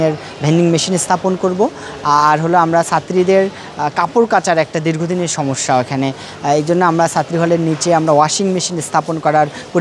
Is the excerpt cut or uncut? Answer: uncut